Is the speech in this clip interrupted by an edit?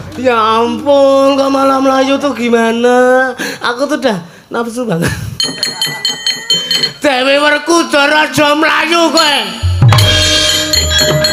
no; 0 cuts

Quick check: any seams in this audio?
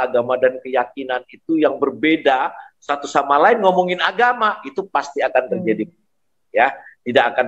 no; 0 cuts

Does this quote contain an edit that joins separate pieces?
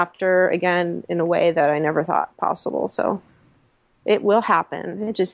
no; 0 cuts

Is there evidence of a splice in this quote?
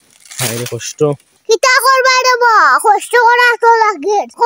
yes; 1 cut; at 1.4 s

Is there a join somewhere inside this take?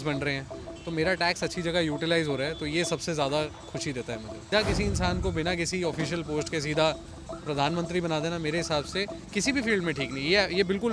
yes; 1 cut; at 4.5 s

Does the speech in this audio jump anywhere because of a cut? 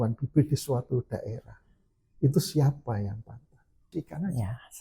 yes; 1 cut; at 3.9 s

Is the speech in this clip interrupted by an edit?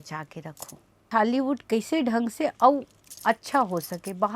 yes; 1 cut; at 1.1 s

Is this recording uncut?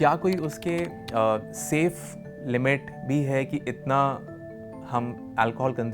yes; 0 cuts

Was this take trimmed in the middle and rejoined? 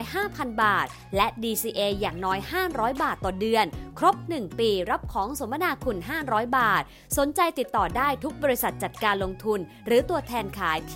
no; 0 cuts

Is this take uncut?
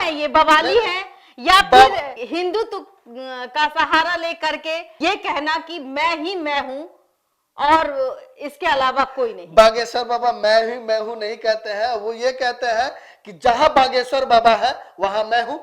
yes; 0 cuts

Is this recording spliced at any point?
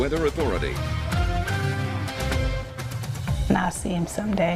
yes; 1 cut; at 3.3 s

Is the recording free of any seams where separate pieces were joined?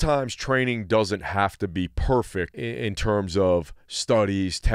no; 1 cut; at 2.6 s

